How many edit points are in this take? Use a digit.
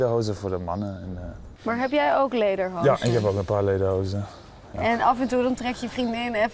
1